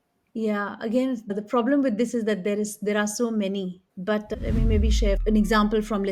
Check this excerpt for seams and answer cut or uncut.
uncut